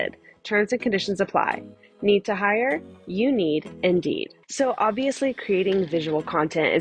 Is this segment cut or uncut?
cut